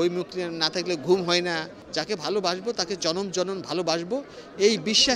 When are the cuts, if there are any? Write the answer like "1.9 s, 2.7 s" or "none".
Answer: 1.8 s